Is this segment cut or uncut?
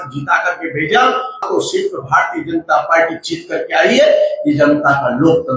cut